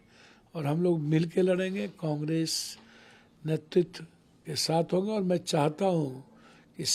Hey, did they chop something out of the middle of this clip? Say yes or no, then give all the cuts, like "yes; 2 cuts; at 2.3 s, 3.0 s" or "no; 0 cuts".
no; 0 cuts